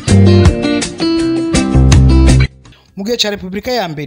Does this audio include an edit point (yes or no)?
no